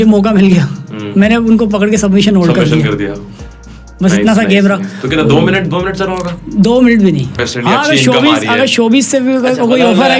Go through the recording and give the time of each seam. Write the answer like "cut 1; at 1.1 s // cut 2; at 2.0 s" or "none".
cut 1; at 7.3 s

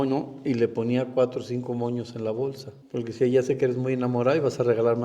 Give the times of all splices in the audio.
cut 1; at 2.7 s

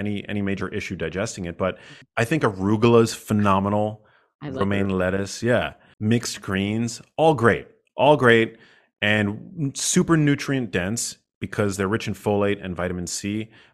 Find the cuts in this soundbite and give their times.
cut 1; at 1.9 s

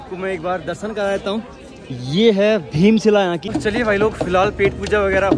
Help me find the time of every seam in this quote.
cut 1; at 3.5 s

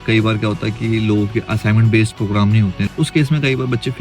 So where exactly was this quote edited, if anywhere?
cut 1; at 2.9 s

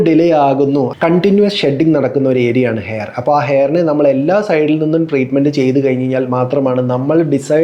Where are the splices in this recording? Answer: cut 1; at 0.9 s

